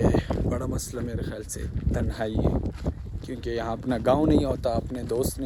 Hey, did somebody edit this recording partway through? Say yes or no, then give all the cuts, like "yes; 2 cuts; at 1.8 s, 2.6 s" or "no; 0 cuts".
no; 0 cuts